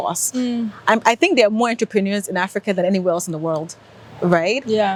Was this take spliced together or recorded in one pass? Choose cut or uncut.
uncut